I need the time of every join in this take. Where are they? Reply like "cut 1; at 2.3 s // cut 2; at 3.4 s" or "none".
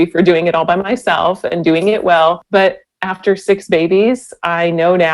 cut 1; at 2.4 s